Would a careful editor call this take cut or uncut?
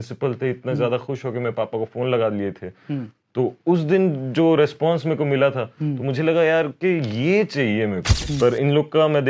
cut